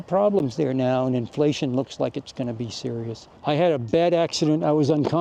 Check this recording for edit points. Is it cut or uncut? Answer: cut